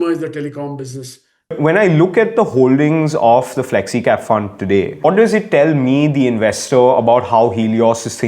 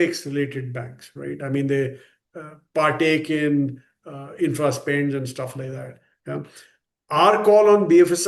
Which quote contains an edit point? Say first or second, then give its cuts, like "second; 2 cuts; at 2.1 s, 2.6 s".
first; 2 cuts; at 1.5 s, 5.0 s